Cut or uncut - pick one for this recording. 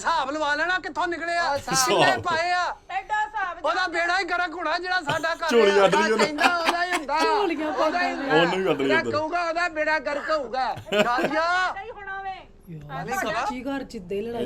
uncut